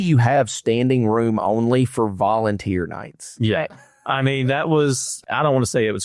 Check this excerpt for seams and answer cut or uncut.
cut